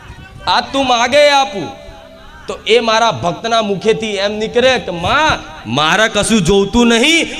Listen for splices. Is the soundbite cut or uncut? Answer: uncut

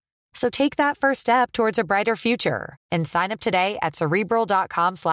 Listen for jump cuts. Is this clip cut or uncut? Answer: uncut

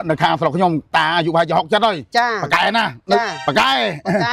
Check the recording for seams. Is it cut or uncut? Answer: cut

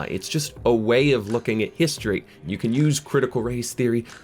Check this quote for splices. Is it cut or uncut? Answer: cut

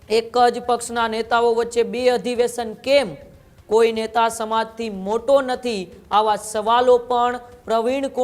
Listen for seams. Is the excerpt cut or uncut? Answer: uncut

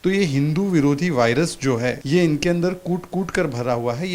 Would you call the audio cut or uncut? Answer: cut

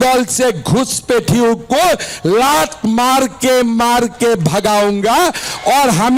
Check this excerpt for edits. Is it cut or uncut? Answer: uncut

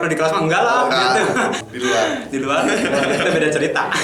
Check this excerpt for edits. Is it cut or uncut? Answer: cut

